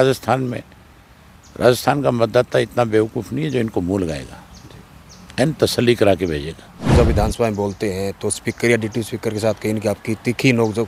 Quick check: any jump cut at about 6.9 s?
yes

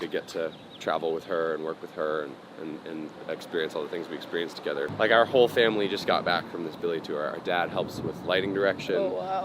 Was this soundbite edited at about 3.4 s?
no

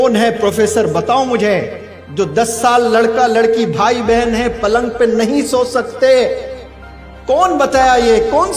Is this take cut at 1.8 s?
no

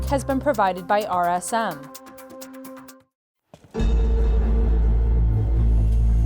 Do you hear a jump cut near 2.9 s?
yes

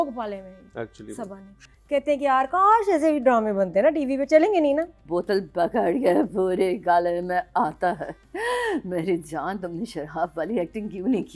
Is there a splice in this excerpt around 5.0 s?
yes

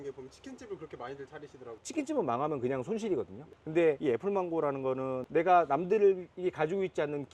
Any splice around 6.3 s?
no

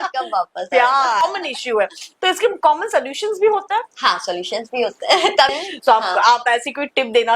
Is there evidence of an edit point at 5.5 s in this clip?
yes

